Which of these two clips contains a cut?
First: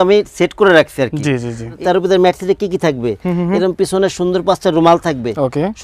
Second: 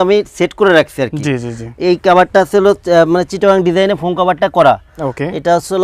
first; 1 cut; at 1.7 s

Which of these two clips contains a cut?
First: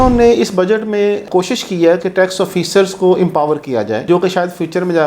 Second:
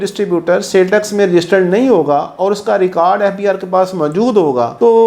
first; 2 cuts; at 1.2 s, 4.0 s

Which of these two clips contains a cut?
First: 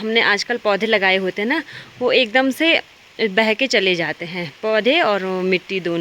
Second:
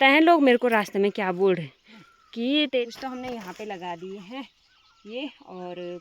second; 1 cut; at 2.7 s

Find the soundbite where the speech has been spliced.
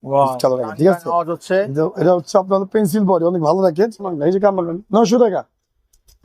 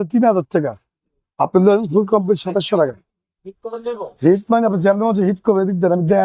first; 1 cut; at 4.1 s

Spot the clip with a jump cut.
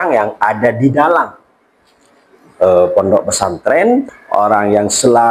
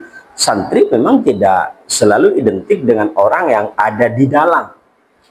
first; 1 cut; at 4.0 s

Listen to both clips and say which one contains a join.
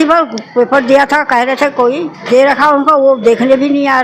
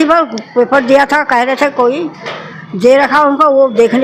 first; 1 cut; at 2.1 s

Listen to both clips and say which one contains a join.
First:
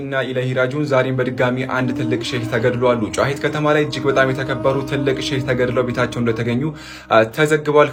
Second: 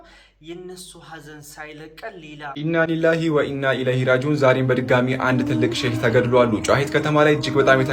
second; 1 cut; at 2.5 s

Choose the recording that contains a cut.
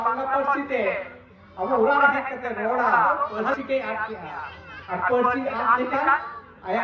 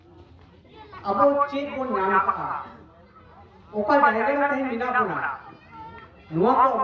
first; 1 cut; at 3.3 s

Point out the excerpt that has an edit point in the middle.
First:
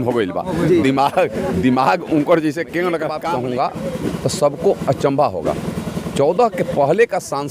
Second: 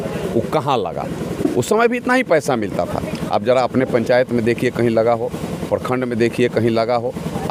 first; 1 cut; at 3.1 s

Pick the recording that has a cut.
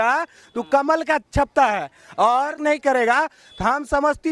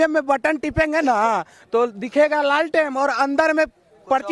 first; 1 cut; at 2.6 s

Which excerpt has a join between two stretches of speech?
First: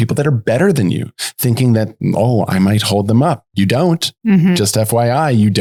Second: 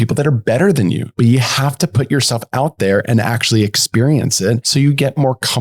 second; 2 cuts; at 1.1 s, 4.6 s

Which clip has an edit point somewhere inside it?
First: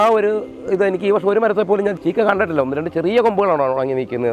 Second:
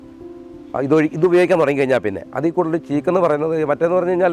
first; 1 cut; at 2.0 s

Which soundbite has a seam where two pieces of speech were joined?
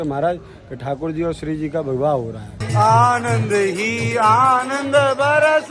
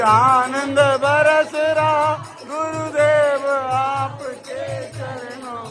first; 1 cut; at 2.5 s

